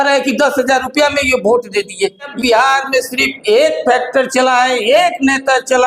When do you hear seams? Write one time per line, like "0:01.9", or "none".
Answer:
0:02.3